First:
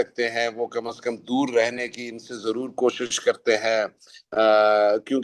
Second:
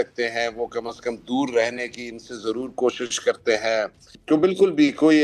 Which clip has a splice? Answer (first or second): second